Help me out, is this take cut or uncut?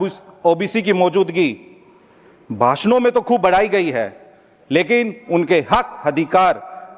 uncut